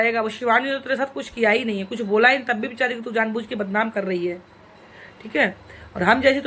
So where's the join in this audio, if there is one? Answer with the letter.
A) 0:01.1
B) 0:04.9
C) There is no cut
C